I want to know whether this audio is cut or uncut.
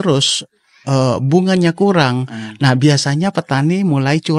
uncut